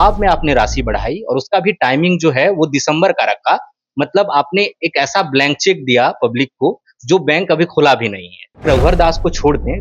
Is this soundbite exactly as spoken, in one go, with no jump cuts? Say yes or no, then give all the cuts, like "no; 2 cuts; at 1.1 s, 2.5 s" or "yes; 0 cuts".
no; 1 cut; at 8.6 s